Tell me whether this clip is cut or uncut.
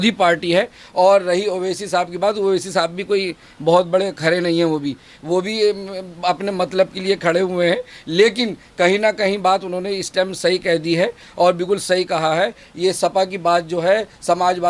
uncut